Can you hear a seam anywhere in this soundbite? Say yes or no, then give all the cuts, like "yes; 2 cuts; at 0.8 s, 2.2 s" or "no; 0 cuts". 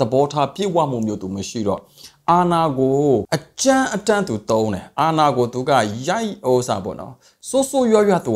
yes; 1 cut; at 3.4 s